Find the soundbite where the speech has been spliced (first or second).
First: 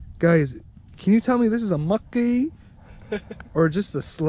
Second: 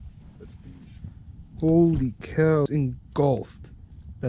second